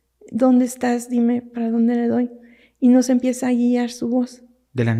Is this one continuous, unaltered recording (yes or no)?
yes